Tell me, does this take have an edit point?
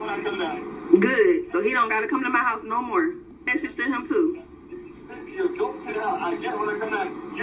yes; 1 cut; at 3.3 s

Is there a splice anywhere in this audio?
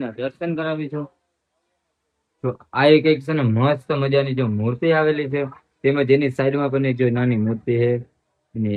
no; 0 cuts

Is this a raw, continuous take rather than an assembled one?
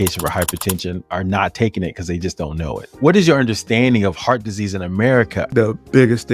no; 3 cuts; at 1.0 s, 2.9 s, 5.5 s

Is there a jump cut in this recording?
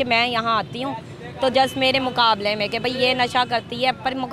no; 0 cuts

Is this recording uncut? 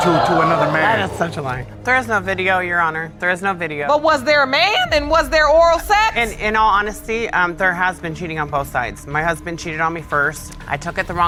yes; 0 cuts

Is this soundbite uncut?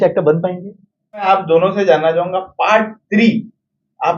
no; 1 cut; at 1.3 s

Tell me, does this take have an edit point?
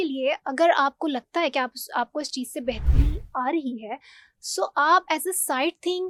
no; 0 cuts

